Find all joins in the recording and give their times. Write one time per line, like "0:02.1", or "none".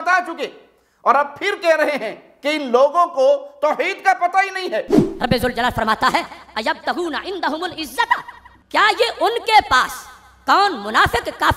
0:05.0